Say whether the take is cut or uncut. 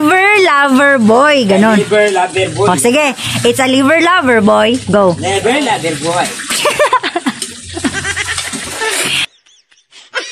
cut